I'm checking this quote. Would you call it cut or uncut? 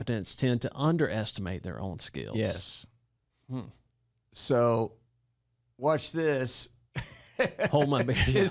uncut